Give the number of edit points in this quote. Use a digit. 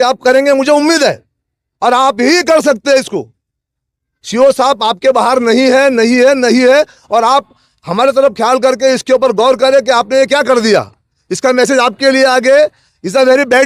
0